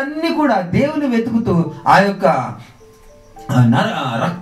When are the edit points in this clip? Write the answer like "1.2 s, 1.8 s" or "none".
none